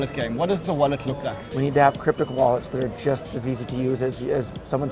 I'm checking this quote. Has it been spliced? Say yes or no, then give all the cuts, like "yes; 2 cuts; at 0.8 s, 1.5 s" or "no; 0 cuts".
yes; 1 cut; at 1.4 s